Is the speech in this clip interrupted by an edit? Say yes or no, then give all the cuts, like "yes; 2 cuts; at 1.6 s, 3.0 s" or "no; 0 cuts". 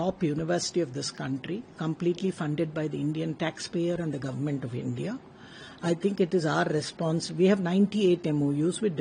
no; 0 cuts